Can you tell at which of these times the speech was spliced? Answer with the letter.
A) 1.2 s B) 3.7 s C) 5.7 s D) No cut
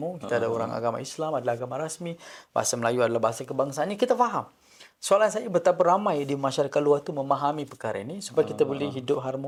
D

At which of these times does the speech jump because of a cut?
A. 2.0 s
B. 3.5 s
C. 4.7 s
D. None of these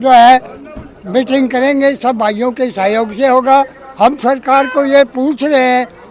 D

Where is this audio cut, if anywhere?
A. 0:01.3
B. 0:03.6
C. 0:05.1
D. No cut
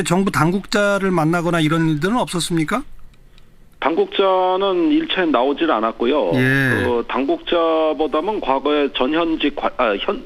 C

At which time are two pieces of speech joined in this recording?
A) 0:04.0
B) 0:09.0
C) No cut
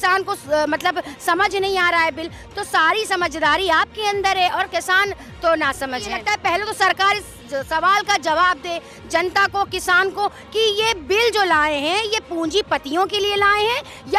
C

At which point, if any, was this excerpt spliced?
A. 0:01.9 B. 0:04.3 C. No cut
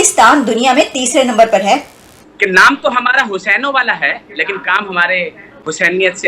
A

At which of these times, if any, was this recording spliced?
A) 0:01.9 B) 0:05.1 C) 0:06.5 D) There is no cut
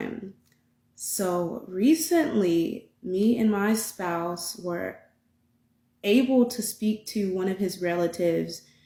D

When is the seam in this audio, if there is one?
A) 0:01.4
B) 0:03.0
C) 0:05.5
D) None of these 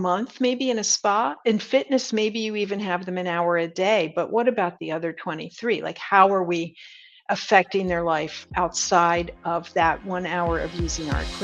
D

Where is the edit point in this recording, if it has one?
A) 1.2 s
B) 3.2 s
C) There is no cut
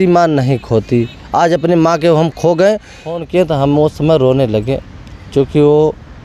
B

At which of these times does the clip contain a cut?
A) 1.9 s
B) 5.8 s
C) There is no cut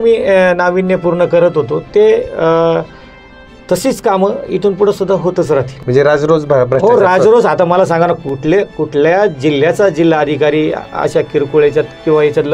B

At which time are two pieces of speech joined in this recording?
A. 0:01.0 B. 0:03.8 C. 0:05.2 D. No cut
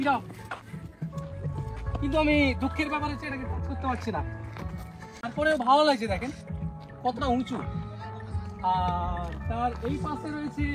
C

